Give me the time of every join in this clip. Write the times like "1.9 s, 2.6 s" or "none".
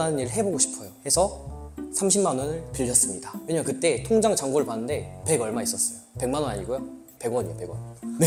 none